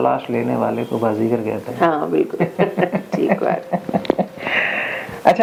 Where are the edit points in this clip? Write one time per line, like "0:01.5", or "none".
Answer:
none